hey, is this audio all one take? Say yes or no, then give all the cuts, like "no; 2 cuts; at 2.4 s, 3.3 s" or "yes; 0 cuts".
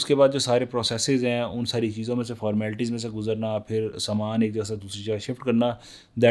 yes; 0 cuts